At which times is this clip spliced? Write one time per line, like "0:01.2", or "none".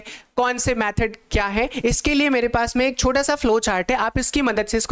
none